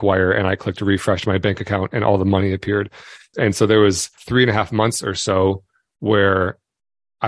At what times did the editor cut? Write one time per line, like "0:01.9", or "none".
0:03.2
0:04.2